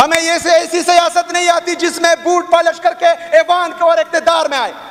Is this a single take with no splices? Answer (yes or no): yes